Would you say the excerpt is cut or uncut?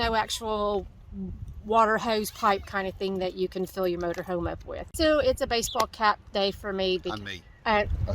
cut